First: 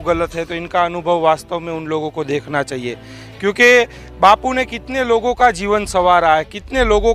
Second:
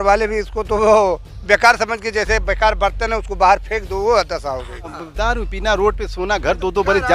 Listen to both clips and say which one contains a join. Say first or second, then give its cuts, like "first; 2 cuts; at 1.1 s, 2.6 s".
second; 1 cut; at 5.0 s